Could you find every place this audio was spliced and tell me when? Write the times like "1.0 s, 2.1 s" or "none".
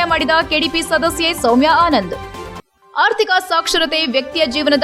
none

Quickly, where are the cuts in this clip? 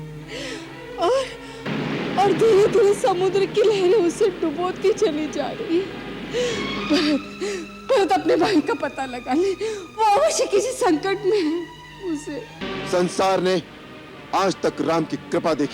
12.6 s

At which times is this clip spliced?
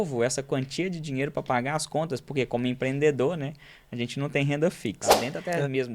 5.0 s

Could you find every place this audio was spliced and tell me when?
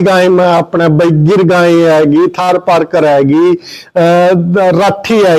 none

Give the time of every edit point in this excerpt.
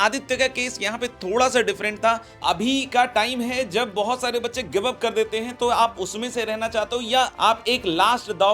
2.4 s, 7.3 s

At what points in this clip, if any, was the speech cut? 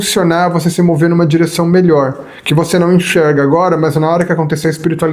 none

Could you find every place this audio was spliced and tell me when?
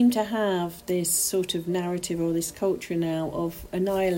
none

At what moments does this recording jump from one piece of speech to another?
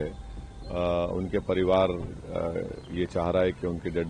none

